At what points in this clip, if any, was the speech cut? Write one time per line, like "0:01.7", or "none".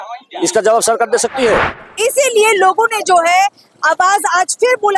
0:01.8